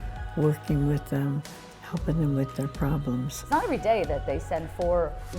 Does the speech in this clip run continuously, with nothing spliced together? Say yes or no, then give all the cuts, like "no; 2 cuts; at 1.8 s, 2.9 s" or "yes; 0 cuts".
no; 1 cut; at 3.4 s